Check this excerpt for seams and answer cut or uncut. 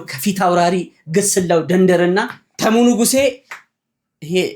uncut